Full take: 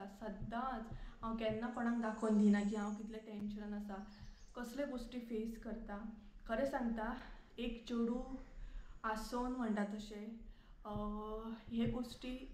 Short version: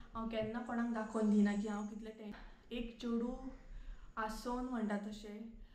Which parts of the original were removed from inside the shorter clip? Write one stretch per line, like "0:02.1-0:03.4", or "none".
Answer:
0:03.4-0:07.2